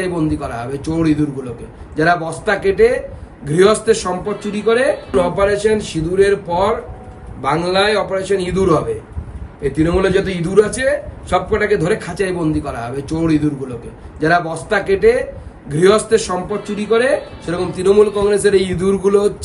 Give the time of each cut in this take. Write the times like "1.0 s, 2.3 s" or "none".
5.0 s